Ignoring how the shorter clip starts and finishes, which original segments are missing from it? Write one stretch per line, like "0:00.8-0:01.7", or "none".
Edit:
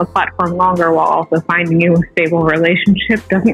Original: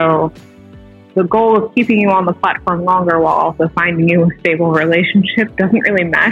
none